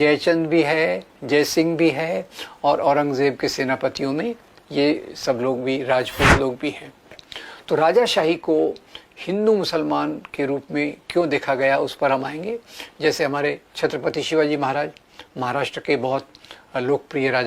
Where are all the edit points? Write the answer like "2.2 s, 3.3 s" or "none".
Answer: 7.3 s